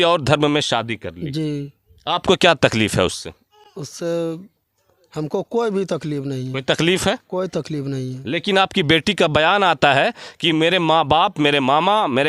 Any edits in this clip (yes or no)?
no